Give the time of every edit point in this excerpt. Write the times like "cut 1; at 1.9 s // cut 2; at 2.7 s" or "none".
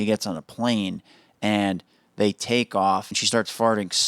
cut 1; at 3.1 s